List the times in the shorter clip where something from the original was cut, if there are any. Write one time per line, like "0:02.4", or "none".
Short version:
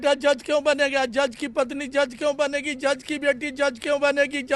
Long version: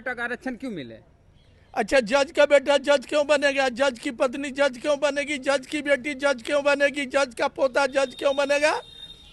none